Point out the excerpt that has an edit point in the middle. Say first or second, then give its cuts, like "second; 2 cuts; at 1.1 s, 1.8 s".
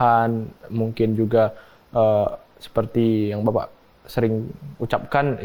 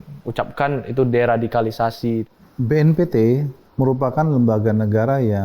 second; 2 cuts; at 2.3 s, 3.6 s